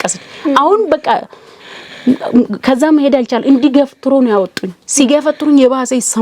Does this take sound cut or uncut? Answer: uncut